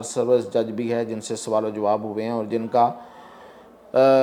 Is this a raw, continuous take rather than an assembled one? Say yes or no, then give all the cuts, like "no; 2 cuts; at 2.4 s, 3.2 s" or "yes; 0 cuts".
yes; 0 cuts